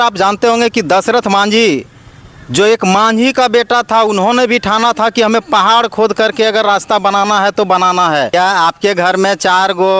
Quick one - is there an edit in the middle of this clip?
yes; 1 cut; at 8.3 s

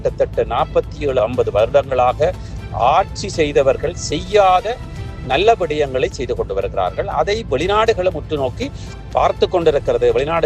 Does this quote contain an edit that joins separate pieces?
yes; 1 cut; at 1.2 s

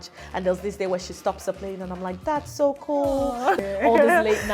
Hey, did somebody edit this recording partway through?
yes; 1 cut; at 3.6 s

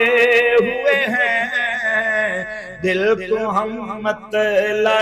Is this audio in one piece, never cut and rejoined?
yes; 0 cuts

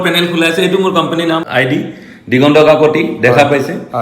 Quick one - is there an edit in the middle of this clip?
yes; 1 cut; at 1.5 s

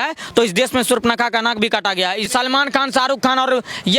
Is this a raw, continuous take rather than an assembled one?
no; 1 cut; at 2.3 s

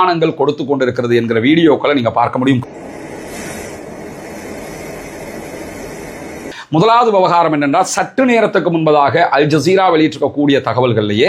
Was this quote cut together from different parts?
yes; 1 cut; at 6.3 s

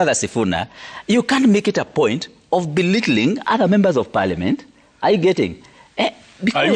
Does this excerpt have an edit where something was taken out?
no; 0 cuts

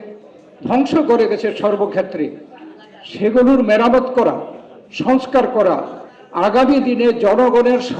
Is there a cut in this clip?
no; 0 cuts

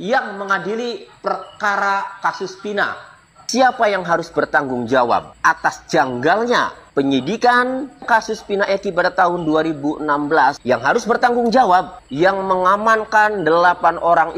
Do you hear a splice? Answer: no; 0 cuts

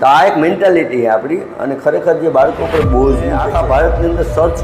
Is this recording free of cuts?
no; 1 cut; at 3.4 s

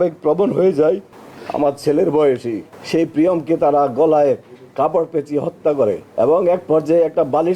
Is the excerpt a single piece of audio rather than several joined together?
no; 2 cuts; at 1.1 s, 6.1 s

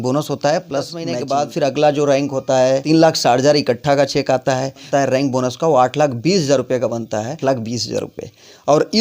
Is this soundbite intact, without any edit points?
no; 4 cuts; at 1.2 s, 2.8 s, 4.9 s, 7.4 s

